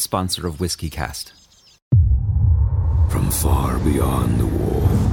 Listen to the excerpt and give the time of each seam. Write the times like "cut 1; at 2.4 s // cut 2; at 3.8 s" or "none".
cut 1; at 1.8 s